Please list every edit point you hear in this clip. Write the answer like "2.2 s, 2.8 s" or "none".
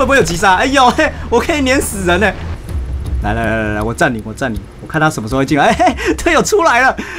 2.5 s

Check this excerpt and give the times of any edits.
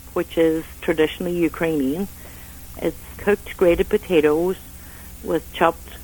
3.0 s

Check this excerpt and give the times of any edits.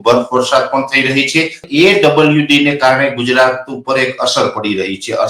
1.7 s

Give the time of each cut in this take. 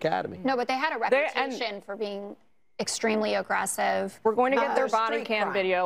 none

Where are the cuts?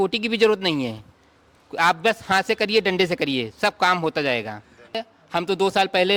5.0 s

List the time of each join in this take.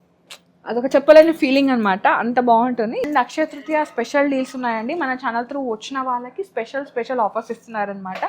3.0 s

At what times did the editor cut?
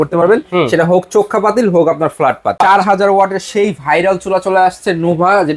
2.6 s

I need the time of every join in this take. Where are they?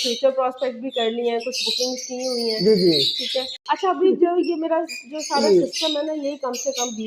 3.5 s

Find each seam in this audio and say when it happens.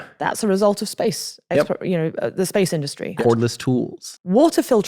3.2 s

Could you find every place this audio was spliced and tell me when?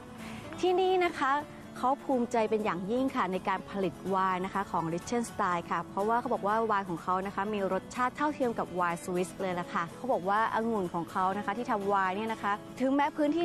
none

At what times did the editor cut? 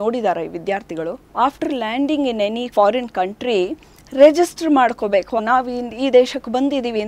1.2 s, 5.4 s

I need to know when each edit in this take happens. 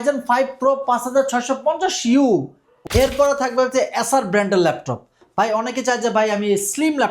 2.7 s

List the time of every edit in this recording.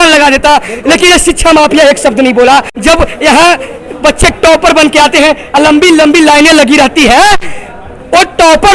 2.7 s

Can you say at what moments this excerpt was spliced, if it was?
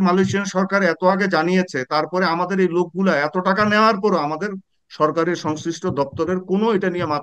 none

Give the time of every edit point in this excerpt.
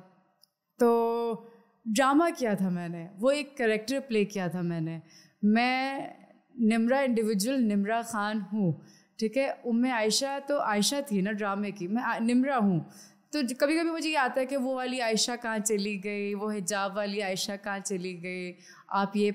none

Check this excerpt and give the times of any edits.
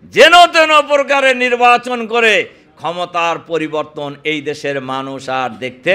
none

